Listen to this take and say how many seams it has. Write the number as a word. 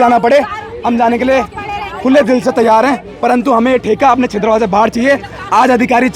zero